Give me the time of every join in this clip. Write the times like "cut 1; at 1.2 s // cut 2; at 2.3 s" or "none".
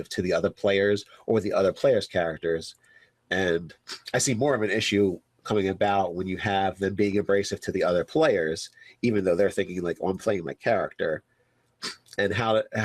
cut 1; at 3.5 s